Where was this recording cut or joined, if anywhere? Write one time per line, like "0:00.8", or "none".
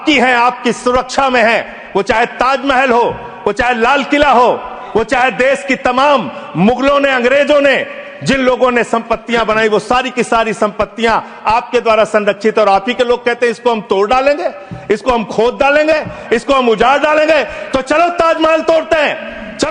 none